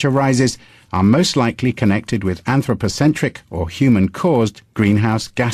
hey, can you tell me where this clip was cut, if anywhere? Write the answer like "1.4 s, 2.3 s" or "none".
3.4 s